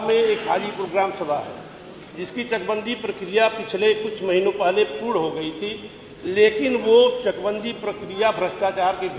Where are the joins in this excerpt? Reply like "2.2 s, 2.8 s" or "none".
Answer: none